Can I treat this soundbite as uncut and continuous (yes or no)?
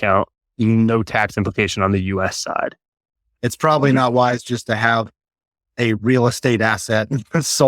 no